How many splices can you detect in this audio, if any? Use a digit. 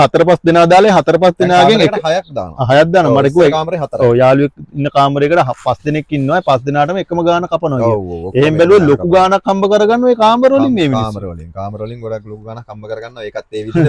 0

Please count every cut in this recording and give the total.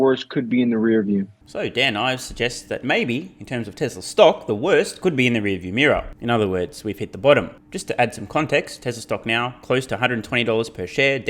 0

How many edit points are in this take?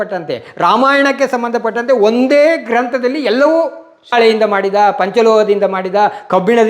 1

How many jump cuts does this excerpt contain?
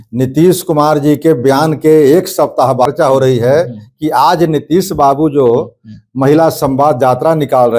1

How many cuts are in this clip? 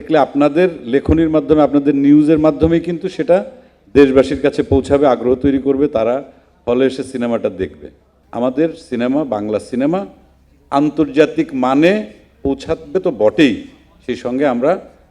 1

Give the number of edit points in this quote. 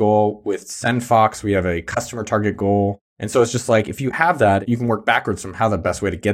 1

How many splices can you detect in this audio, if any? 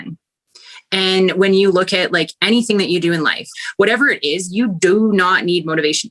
1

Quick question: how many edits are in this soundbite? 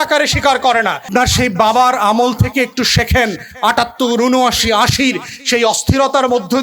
1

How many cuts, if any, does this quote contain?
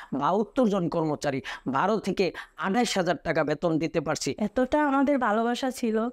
1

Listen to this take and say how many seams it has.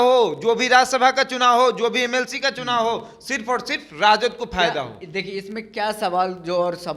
0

